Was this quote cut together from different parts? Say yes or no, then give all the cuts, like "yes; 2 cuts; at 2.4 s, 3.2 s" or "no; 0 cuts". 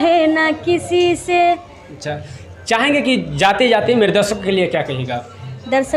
no; 0 cuts